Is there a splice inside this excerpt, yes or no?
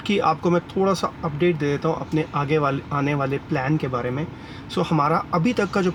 no